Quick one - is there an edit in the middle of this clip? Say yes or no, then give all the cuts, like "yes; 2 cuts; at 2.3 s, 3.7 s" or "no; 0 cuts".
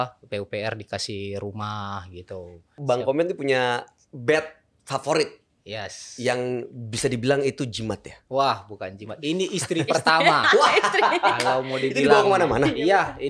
yes; 1 cut; at 2.8 s